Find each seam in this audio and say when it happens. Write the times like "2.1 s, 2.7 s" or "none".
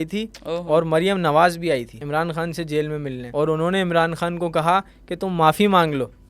2.0 s, 3.2 s